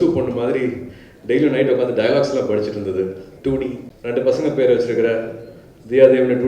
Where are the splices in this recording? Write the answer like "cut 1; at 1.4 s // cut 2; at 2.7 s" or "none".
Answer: cut 1; at 3.3 s // cut 2; at 3.9 s